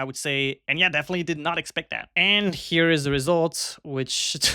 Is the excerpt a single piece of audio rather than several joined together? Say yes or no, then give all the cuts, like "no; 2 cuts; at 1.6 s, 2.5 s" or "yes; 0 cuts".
no; 1 cut; at 2.1 s